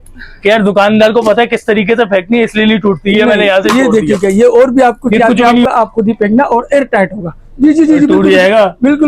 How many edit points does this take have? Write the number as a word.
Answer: one